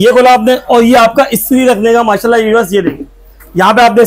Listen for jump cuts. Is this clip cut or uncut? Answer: uncut